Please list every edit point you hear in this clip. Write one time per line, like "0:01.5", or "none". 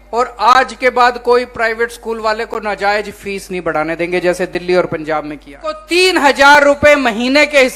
0:05.8

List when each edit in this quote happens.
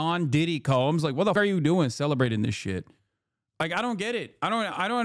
0:01.3

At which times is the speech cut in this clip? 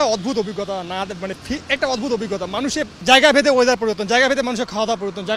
0:02.9

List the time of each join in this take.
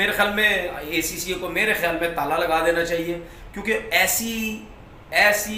none

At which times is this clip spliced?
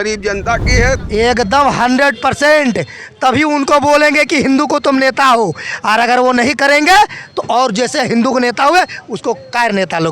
0:01.0

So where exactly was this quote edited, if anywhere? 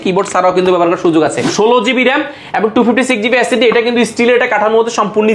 0:01.5

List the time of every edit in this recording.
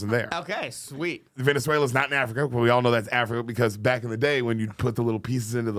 0:01.3

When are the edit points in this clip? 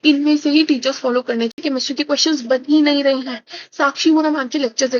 0:01.6

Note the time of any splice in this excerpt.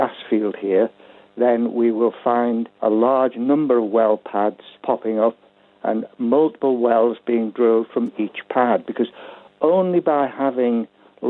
0:02.7
0:04.8

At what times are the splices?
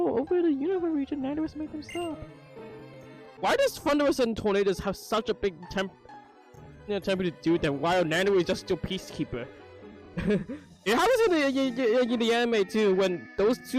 0:03.2

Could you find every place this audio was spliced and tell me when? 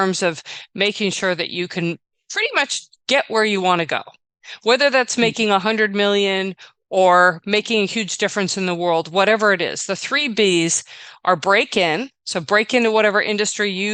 none

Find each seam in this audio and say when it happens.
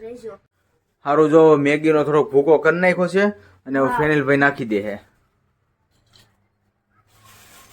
0:01.0

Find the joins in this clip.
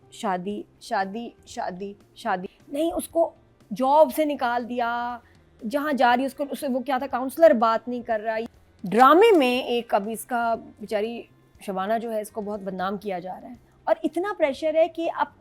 0:02.6
0:08.5

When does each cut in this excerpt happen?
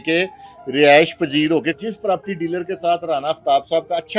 0:01.8

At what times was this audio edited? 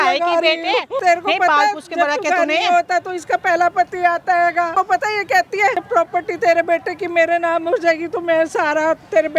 0:01.0
0:04.7
0:05.8

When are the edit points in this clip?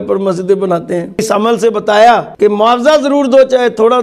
0:01.2
0:02.3

